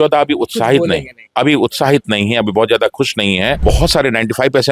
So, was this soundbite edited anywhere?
yes; 1 cut; at 3.6 s

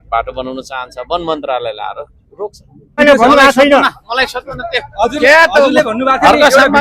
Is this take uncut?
no; 1 cut; at 3.0 s

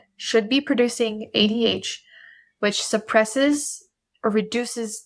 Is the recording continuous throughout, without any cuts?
yes; 0 cuts

